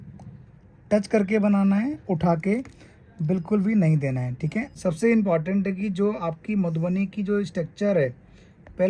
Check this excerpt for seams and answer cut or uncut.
cut